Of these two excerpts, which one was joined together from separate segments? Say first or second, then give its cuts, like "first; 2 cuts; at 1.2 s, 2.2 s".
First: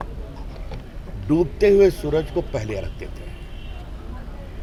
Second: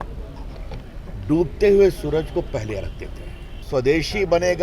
second; 1 cut; at 3.6 s